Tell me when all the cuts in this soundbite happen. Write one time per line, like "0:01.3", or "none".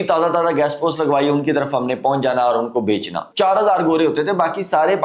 0:03.2